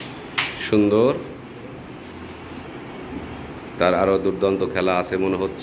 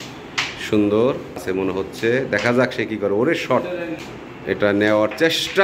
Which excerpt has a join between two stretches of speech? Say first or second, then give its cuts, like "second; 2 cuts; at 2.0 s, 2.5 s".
second; 2 cuts; at 1.4 s, 4.0 s